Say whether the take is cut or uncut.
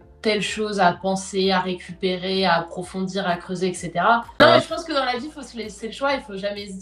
cut